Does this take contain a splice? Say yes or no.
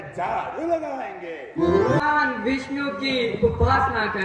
yes